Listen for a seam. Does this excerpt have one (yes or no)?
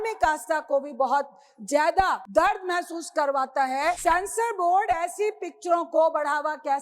yes